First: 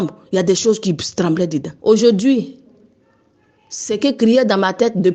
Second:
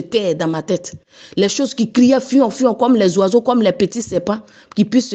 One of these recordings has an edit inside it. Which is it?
first; 1 cut; at 1.7 s

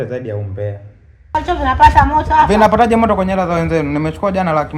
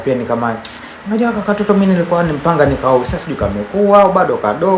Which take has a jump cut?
first; 1 cut; at 1.3 s

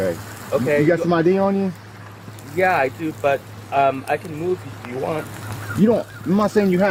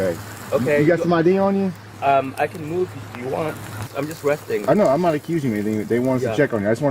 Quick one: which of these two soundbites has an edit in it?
second; 2 cuts; at 1.9 s, 3.9 s

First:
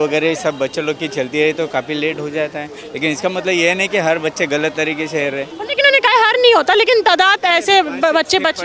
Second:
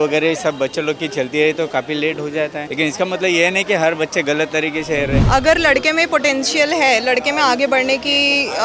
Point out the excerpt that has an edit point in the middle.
second; 2 cuts; at 2.6 s, 5.2 s

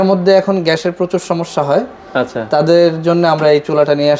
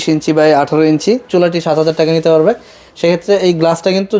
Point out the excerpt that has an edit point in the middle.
second; 1 cut; at 1.2 s

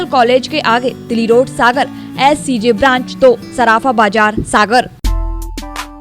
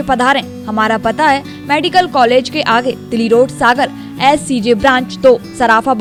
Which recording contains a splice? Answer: first; 1 cut; at 5.0 s

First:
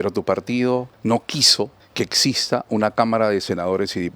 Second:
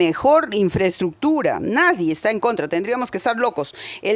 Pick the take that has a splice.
first; 2 cuts; at 0.9 s, 1.8 s

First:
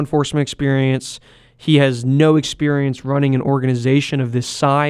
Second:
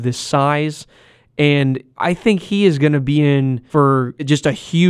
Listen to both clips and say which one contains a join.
second; 2 cuts; at 1.9 s, 3.6 s

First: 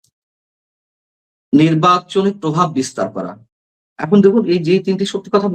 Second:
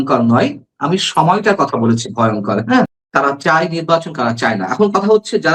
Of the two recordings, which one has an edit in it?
second; 1 cut; at 3.0 s

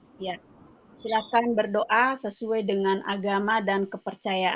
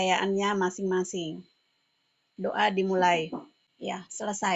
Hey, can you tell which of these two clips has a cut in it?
second; 1 cut; at 3.6 s

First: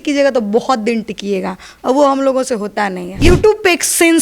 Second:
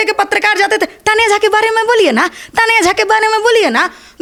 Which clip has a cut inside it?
first; 1 cut; at 3.2 s

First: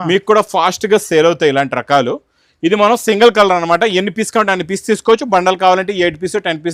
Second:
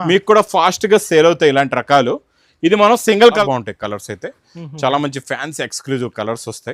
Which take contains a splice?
second; 1 cut; at 3.4 s

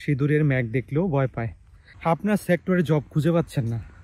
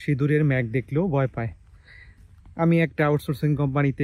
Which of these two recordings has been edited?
first; 1 cut; at 1.9 s

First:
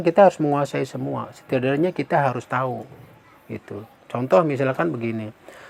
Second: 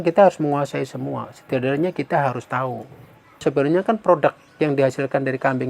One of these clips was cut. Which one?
second; 1 cut; at 3.4 s

